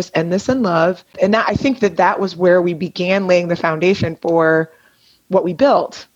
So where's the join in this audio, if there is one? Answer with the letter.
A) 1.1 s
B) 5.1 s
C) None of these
A